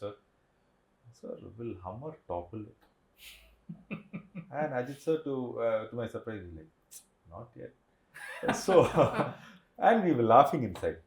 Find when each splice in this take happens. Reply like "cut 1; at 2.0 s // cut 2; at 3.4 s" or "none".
none